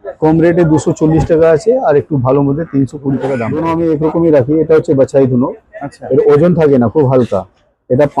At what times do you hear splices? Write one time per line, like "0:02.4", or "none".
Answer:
0:03.5